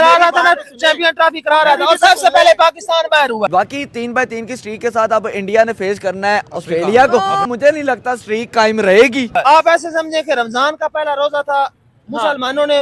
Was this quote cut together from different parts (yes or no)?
yes